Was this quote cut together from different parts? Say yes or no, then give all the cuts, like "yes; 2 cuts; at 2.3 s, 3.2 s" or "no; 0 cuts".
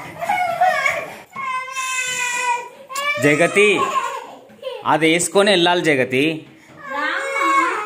no; 0 cuts